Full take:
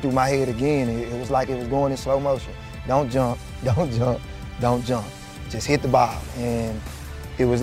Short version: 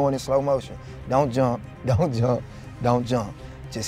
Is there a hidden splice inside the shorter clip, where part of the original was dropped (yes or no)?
no